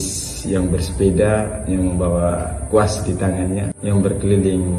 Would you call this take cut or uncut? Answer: cut